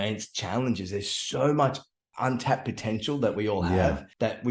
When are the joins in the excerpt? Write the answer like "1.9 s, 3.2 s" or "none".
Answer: none